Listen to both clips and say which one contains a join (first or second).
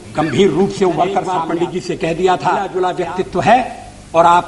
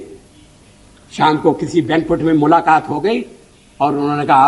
first